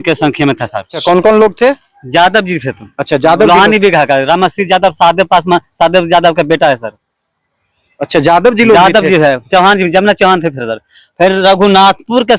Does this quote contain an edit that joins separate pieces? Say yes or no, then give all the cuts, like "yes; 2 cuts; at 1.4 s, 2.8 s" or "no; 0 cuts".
yes; 1 cut; at 1.0 s